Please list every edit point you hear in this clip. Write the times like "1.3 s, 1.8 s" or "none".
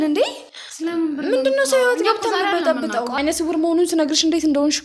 3.1 s